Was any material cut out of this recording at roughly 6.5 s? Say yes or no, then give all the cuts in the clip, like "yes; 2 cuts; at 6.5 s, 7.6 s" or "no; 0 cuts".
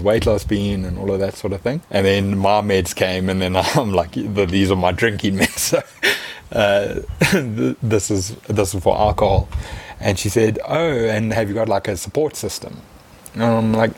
no; 0 cuts